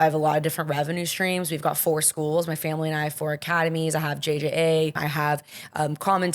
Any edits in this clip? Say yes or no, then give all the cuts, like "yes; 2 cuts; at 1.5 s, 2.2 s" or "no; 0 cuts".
yes; 1 cut; at 5.0 s